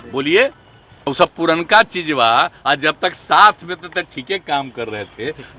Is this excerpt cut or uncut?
cut